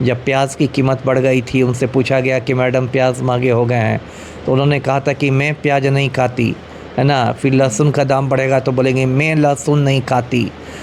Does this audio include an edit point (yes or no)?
no